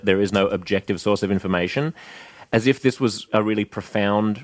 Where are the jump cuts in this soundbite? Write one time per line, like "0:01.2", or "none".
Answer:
0:03.3